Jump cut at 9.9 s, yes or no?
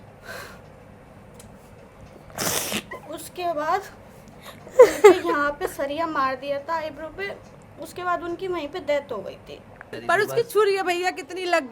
yes